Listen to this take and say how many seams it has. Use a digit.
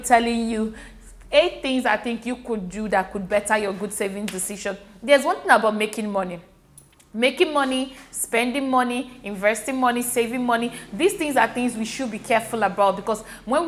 0